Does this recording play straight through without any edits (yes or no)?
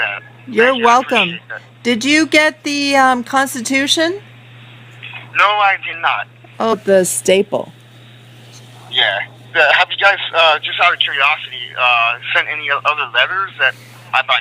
yes